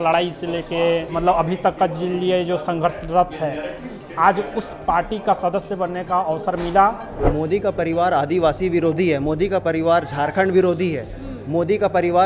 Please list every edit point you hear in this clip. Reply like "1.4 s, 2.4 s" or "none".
1.1 s, 7.1 s